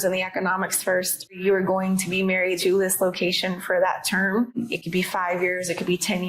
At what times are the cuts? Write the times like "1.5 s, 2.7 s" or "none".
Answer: 1.3 s, 2.6 s, 4.6 s

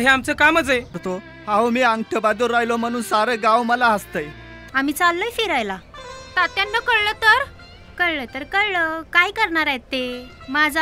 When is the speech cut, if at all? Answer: 1.0 s, 4.5 s

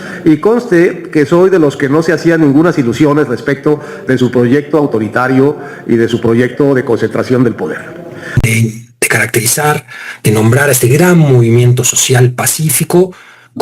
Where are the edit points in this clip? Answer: 8.4 s

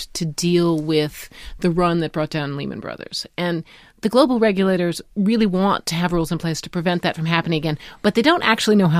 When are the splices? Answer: none

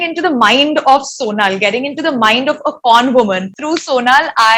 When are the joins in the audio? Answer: 3.5 s

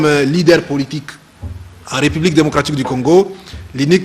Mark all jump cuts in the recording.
0.9 s

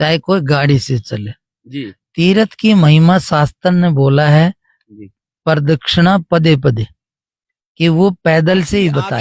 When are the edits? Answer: none

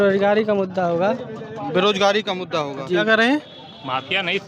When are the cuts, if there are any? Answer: 3.0 s

